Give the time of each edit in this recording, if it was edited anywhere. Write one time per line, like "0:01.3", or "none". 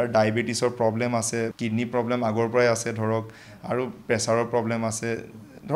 0:01.5